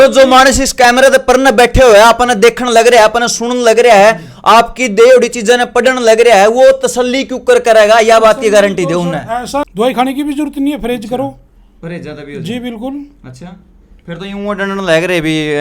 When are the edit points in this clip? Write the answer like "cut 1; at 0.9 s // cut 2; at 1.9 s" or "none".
cut 1; at 9.7 s